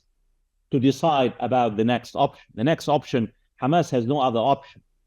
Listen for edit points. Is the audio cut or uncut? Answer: uncut